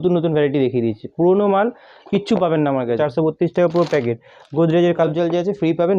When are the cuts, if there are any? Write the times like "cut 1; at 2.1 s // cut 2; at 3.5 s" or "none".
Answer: cut 1; at 3.0 s // cut 2; at 5.0 s